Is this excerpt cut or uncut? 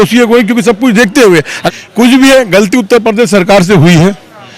cut